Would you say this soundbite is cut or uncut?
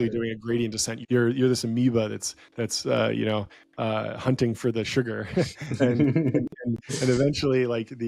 cut